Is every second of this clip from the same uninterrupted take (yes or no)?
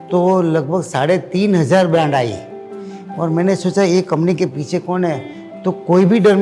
yes